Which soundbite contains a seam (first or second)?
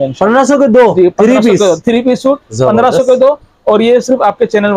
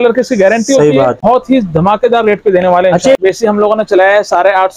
second